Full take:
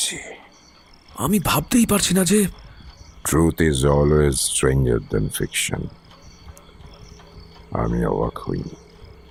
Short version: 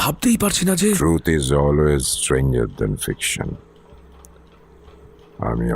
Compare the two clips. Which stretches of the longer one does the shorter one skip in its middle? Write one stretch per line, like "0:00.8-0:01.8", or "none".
0:02.5-0:03.3